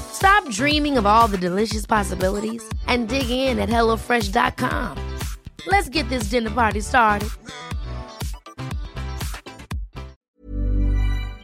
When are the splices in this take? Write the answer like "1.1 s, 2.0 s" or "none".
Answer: 10.1 s